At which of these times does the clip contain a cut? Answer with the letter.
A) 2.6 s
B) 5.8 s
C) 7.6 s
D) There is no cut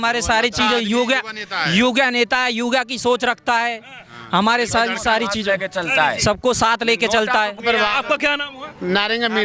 C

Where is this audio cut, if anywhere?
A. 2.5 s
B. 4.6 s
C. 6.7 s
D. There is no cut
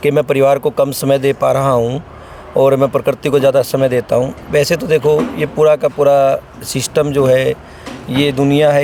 D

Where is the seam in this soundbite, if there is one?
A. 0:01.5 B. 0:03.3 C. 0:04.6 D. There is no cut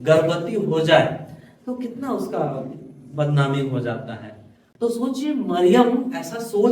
C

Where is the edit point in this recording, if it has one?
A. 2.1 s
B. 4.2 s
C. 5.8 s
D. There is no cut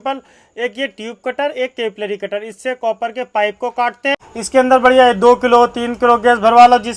B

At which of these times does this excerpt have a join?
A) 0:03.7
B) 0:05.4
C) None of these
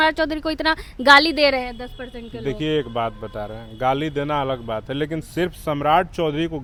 C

